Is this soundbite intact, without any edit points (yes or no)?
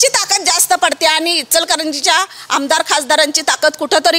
yes